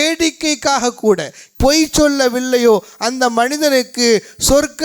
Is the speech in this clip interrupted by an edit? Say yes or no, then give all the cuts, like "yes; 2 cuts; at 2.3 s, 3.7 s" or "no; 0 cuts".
yes; 1 cut; at 1.4 s